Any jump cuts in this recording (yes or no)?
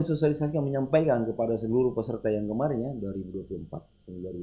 no